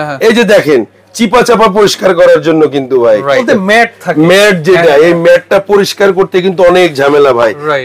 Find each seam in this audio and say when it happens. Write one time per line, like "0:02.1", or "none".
0:03.4